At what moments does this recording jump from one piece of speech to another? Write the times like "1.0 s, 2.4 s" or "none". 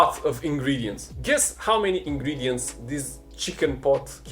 1.1 s